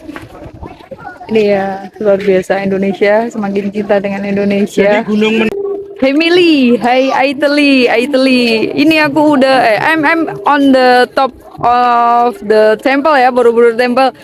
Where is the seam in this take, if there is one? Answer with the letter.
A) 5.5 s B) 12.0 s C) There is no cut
A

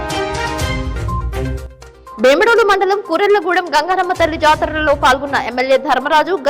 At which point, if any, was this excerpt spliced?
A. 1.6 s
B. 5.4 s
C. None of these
A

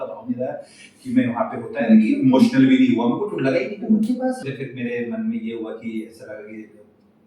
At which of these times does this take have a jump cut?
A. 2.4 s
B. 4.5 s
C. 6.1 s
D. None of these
B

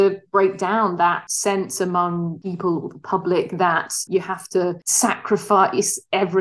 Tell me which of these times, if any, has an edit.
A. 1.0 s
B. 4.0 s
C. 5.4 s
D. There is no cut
B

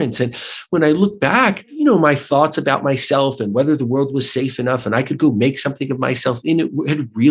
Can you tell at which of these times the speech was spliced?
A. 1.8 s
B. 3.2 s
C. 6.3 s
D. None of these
A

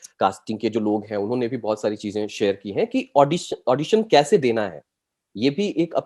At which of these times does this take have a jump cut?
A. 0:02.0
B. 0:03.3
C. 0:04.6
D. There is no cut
D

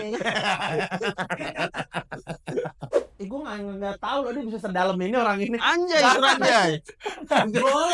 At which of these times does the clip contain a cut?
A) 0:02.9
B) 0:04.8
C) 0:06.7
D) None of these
A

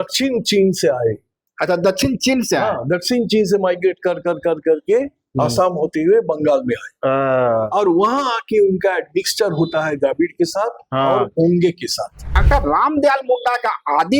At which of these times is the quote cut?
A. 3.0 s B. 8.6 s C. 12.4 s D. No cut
C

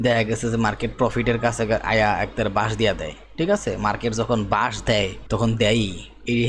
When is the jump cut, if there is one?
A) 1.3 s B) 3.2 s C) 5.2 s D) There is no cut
C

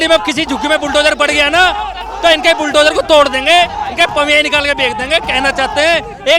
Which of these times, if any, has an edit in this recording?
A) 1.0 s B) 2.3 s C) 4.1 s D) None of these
D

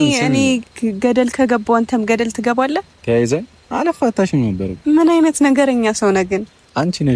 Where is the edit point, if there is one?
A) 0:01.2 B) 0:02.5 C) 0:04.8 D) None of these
C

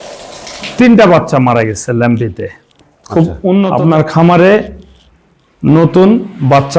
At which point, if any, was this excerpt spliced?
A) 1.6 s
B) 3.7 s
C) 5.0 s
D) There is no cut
B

